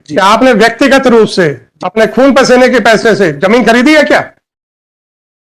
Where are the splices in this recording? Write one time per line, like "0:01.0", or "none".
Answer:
none